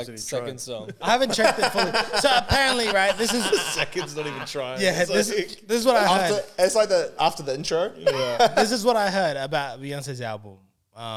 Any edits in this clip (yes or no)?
no